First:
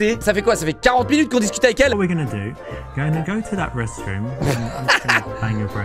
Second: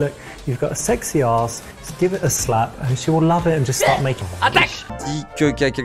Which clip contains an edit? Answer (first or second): second